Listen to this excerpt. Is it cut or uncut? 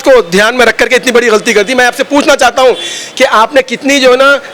uncut